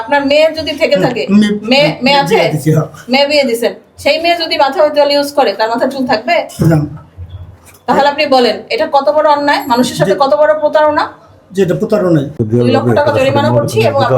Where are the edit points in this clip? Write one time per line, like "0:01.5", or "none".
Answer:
0:12.4